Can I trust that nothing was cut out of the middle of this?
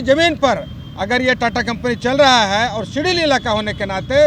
yes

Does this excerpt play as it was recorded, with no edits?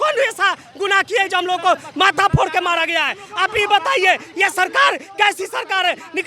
yes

